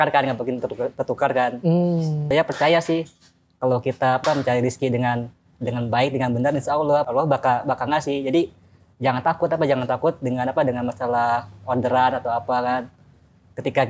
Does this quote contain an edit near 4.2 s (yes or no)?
yes